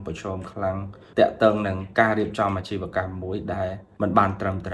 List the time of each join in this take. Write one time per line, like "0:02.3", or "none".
0:00.9
0:03.8